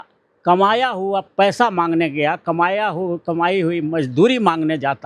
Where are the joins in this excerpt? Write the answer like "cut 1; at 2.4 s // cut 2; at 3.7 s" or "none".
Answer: none